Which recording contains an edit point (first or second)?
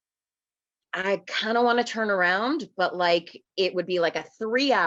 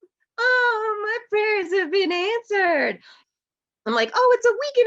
second